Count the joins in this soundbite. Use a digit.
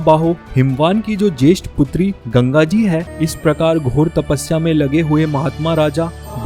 1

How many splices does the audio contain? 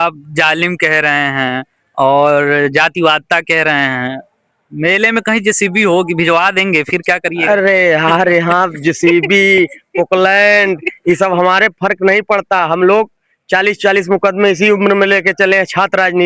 0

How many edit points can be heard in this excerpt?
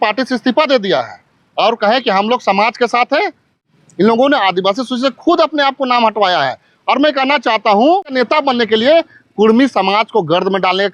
2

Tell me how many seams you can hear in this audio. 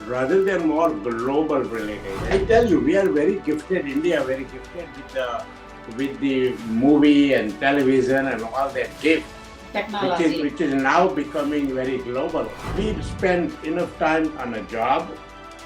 2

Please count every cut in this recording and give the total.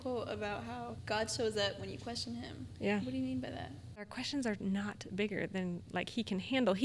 2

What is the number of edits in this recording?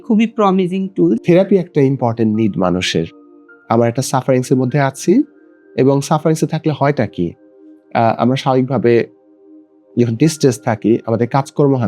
1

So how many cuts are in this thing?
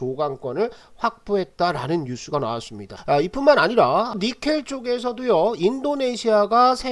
1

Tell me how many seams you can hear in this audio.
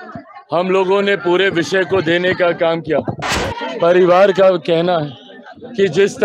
1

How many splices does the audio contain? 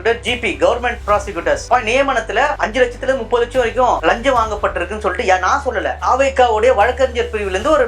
1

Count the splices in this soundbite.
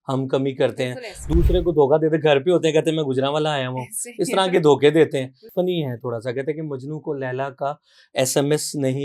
1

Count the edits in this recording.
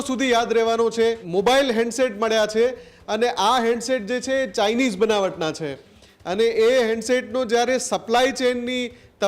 1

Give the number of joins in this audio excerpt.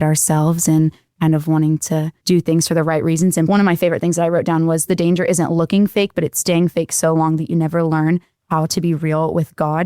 2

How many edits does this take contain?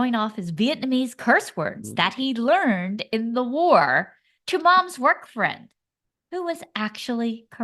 0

